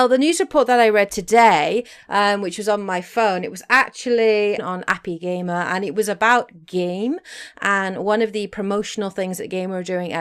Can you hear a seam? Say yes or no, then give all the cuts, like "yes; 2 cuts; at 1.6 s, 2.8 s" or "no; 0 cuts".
yes; 1 cut; at 7.9 s